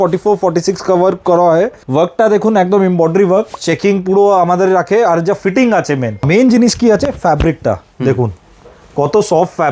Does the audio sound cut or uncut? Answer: cut